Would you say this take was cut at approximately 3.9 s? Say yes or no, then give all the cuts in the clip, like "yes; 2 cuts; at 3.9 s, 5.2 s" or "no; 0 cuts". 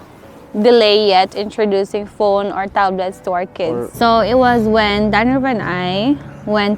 yes; 1 cut; at 3.9 s